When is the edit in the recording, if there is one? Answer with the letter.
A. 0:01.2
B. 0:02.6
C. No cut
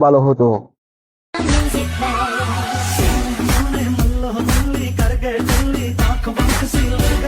A